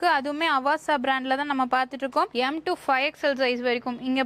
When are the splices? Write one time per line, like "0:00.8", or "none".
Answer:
none